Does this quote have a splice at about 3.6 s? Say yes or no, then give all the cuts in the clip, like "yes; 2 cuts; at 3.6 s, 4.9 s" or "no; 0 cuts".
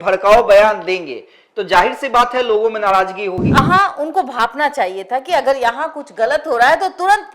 yes; 1 cut; at 3.6 s